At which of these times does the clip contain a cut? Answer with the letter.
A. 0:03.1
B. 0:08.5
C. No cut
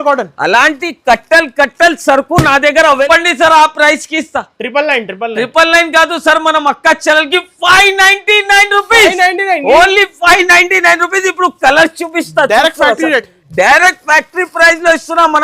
A